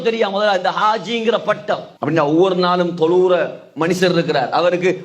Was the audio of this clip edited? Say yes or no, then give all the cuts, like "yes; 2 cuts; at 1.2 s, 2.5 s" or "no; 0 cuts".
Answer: yes; 1 cut; at 1.9 s